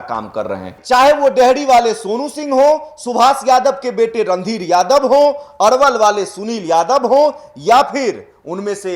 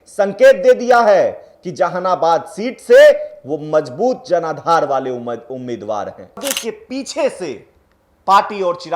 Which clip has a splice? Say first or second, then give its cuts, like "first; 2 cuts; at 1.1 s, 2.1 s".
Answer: second; 1 cut; at 6.4 s